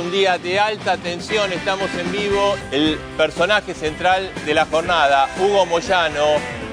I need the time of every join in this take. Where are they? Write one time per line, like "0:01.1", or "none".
0:02.6